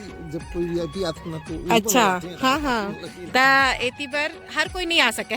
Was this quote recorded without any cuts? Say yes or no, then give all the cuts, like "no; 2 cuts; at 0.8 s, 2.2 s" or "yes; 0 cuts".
yes; 0 cuts